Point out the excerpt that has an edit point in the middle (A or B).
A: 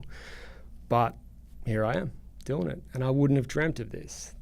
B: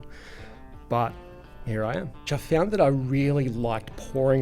B